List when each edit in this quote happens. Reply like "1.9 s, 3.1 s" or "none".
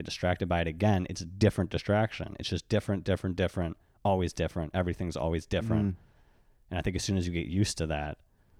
none